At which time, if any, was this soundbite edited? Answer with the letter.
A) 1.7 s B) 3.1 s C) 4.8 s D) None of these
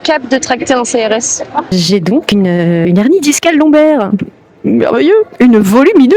A